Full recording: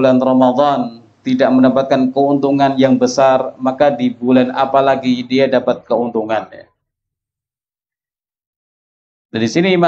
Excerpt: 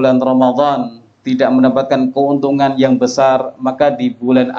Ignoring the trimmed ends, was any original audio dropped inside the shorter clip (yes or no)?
no